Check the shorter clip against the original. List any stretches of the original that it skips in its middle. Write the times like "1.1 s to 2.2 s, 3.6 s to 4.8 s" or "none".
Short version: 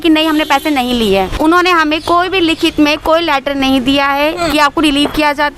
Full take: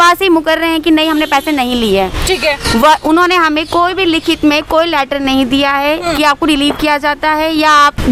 2.2 s to 3.0 s